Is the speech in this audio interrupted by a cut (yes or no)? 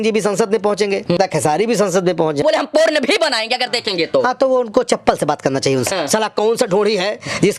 yes